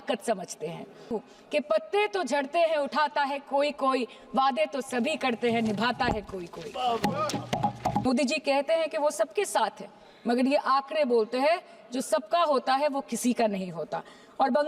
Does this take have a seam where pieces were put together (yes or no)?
yes